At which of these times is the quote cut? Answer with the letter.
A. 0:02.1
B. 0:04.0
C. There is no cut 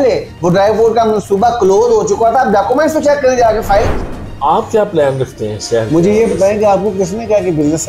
B